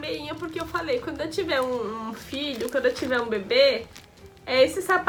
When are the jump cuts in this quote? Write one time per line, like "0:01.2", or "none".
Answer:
none